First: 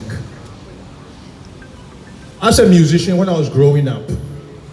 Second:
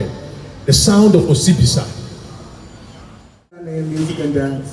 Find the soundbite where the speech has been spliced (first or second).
second